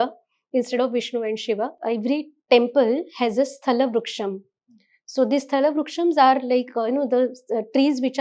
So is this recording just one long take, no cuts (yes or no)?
no